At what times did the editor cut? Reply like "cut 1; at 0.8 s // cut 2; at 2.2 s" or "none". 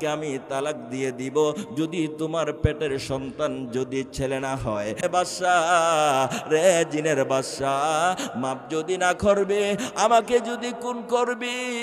cut 1; at 5.0 s